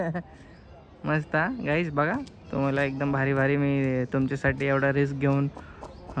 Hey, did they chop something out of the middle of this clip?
no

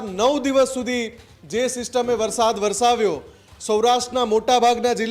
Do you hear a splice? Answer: no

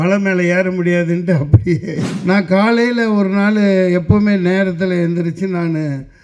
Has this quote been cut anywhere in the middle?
yes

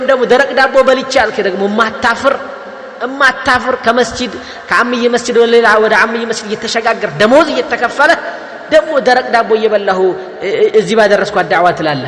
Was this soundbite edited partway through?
no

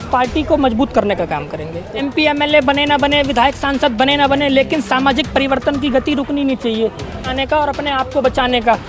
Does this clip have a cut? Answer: yes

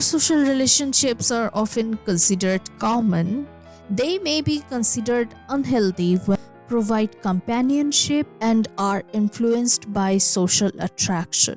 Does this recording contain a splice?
yes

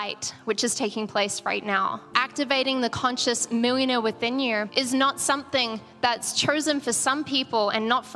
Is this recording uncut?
no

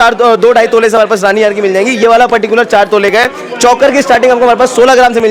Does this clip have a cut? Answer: no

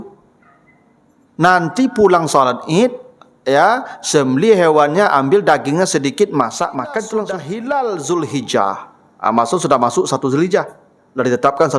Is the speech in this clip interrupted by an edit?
yes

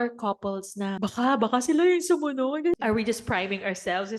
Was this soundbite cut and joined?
yes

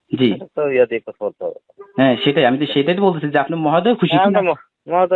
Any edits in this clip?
no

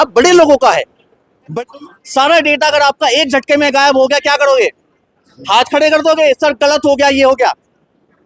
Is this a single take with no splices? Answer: no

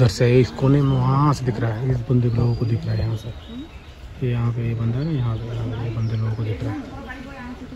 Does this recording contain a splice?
no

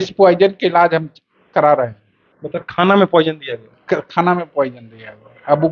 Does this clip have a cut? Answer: no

